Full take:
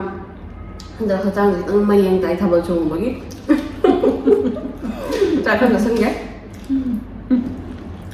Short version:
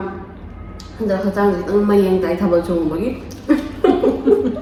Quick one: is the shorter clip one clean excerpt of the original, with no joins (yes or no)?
yes